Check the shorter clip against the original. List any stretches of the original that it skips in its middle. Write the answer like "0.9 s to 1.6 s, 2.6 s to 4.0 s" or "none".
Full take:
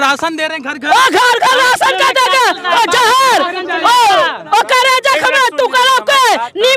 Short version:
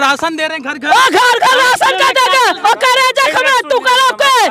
2.6 s to 4.4 s